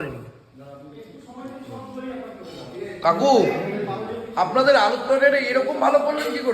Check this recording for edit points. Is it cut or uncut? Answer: uncut